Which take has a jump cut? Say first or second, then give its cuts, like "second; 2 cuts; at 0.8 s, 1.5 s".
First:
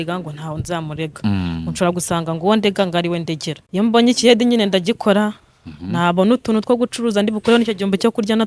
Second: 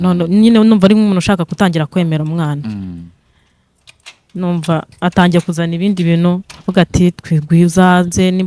first; 1 cut; at 3.5 s